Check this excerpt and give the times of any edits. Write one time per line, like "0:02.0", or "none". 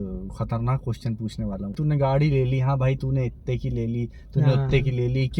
0:01.7